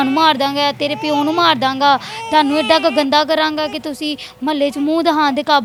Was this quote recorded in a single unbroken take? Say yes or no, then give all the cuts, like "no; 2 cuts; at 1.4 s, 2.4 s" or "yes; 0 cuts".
yes; 0 cuts